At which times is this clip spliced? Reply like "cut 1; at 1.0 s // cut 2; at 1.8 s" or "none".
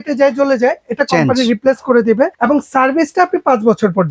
cut 1; at 2.4 s